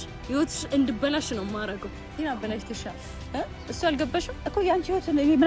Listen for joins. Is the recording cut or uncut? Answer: cut